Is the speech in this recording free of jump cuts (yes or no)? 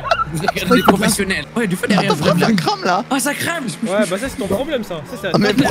no